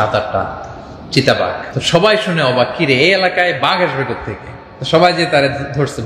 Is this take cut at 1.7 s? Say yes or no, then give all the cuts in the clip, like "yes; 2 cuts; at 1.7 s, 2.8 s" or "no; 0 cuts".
yes; 1 cut; at 1.7 s